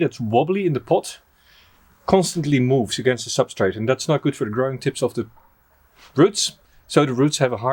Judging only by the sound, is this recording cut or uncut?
uncut